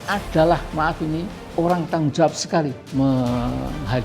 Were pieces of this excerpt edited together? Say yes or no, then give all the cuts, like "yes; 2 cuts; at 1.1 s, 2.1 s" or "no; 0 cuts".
yes; 2 cuts; at 1.4 s, 2.8 s